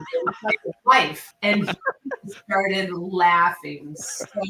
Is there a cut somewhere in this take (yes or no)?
no